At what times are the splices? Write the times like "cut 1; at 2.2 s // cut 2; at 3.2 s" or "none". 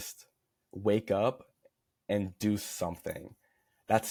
none